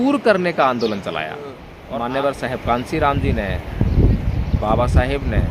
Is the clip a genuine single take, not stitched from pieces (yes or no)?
no